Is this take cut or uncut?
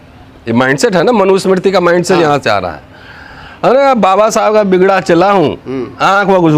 uncut